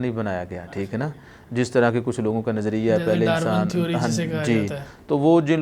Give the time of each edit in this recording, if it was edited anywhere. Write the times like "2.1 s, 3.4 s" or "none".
none